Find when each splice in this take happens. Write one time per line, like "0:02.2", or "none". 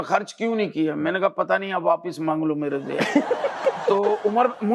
none